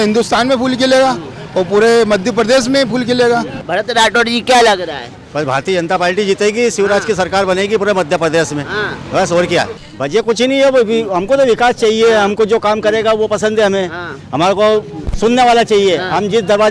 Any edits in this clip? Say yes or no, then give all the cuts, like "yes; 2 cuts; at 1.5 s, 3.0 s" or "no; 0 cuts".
yes; 1 cut; at 9.8 s